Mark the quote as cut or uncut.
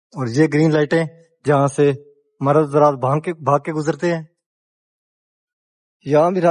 uncut